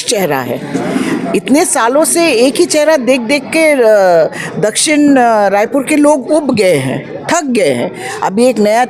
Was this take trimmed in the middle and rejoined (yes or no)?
no